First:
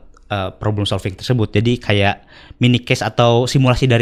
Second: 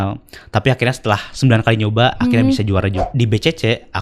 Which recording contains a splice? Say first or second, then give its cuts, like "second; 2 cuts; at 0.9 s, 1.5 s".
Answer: second; 1 cut; at 3.0 s